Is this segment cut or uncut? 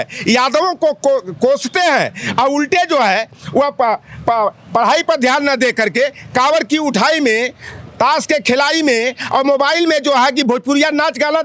uncut